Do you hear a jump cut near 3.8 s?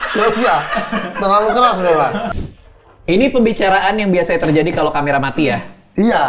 no; 1 cut; at 2.3 s

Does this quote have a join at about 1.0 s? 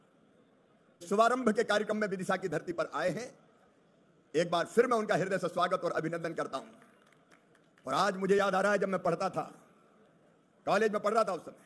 yes; 1 cut; at 1.0 s

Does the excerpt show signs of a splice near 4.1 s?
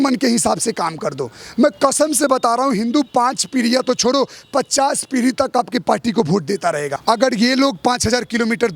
no; 1 cut; at 6.9 s

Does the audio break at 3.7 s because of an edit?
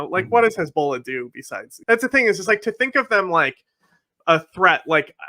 no; 1 cut; at 1.7 s

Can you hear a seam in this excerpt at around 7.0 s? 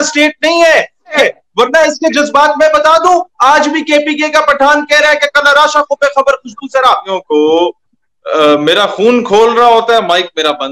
yes; 2 cuts; at 1.2 s, 7.0 s

